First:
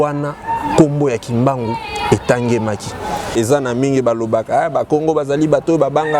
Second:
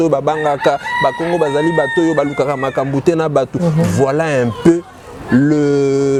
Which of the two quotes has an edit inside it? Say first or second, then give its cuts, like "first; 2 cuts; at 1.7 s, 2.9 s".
first; 1 cut; at 3.3 s